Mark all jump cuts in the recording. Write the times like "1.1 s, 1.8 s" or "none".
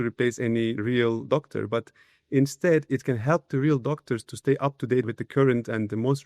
0.9 s, 5.1 s